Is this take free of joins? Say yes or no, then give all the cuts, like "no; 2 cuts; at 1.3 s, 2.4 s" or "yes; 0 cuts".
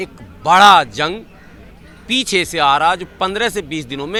yes; 0 cuts